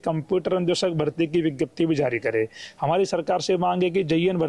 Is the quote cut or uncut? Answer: uncut